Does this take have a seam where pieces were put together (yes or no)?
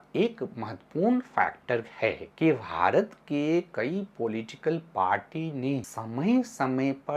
yes